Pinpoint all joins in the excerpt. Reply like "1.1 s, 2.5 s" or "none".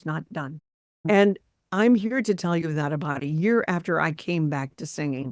1.0 s